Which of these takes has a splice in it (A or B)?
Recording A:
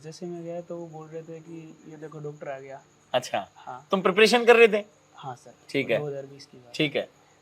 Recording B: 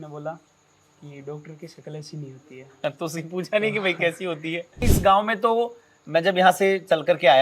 B